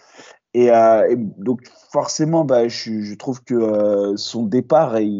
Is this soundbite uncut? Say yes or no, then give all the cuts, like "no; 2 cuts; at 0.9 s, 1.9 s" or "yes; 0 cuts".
yes; 0 cuts